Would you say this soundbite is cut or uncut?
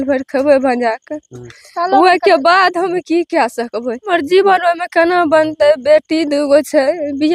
cut